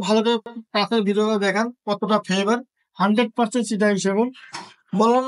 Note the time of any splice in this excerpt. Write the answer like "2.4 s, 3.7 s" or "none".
none